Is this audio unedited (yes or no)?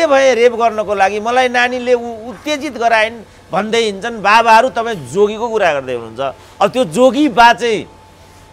yes